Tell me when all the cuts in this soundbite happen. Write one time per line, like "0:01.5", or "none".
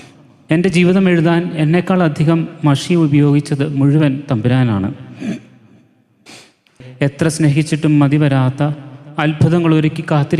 0:06.7